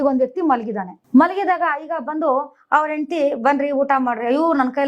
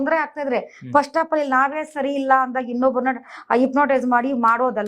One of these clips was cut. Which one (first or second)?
first